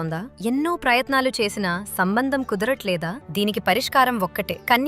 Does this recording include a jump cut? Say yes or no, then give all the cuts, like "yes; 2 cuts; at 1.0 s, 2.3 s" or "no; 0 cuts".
yes; 1 cut; at 3.2 s